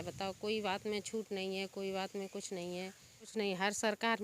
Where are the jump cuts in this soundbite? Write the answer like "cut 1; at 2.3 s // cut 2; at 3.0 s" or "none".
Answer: cut 1; at 3.3 s